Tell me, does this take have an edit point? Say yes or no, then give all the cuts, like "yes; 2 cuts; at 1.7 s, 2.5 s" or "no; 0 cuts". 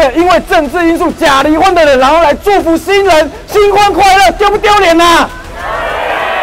no; 0 cuts